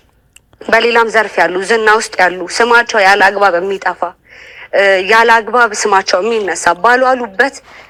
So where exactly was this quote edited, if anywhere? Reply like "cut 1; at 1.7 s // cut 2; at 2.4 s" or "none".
none